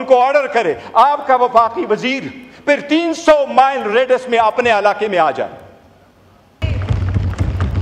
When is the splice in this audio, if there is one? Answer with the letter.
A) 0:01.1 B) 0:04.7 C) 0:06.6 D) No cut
C